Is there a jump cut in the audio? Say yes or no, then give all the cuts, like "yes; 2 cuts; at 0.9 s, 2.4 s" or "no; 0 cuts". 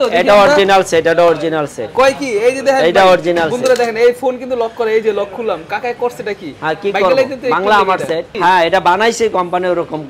yes; 1 cut; at 8.3 s